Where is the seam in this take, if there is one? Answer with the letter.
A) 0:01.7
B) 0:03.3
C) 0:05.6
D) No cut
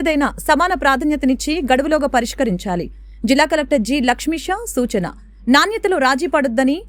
D